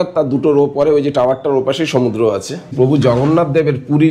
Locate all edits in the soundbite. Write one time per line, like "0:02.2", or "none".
0:02.7